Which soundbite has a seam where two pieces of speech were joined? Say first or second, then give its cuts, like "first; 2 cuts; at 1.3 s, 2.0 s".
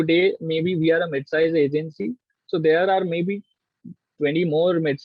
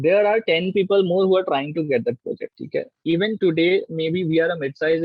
second; 1 cut; at 2.5 s